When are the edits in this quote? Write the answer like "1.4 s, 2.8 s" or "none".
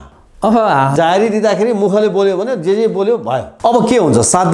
3.5 s